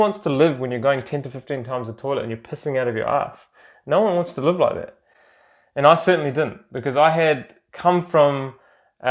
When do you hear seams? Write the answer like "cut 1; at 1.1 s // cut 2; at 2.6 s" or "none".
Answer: none